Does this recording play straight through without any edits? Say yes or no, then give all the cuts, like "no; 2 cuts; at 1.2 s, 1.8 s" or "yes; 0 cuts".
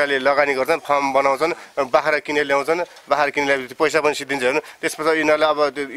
yes; 0 cuts